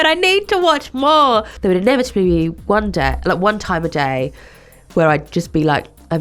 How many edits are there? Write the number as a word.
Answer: one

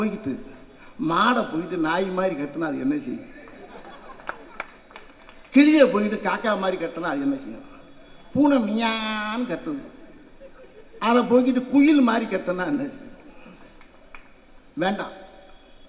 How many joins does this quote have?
zero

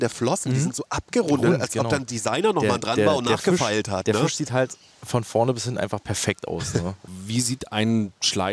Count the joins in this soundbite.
one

